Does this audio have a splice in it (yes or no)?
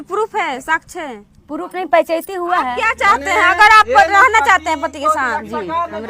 yes